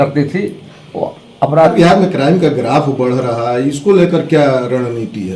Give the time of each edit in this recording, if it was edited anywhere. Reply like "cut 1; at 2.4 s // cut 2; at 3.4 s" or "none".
cut 1; at 1.7 s